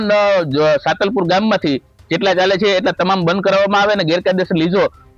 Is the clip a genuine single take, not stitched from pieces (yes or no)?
yes